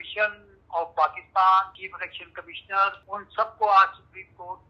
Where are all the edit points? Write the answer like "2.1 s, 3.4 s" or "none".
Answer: 1.8 s, 3.0 s

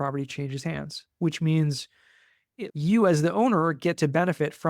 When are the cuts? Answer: 2.6 s

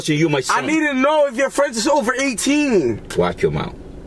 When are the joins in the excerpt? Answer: 3.1 s

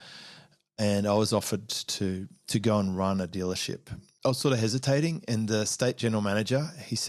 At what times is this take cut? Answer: 4.1 s

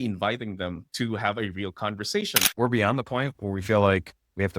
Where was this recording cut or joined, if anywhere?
2.4 s

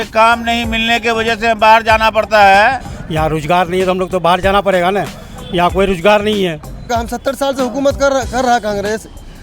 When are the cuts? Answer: 2.9 s, 6.9 s

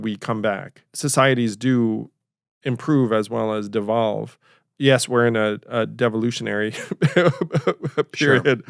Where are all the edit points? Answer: 0.9 s

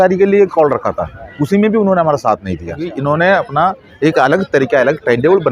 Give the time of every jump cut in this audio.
1.2 s, 2.9 s

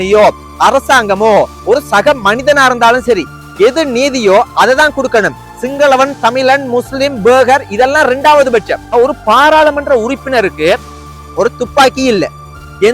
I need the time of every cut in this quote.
8.9 s

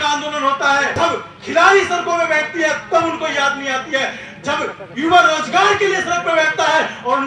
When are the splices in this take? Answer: 0.9 s

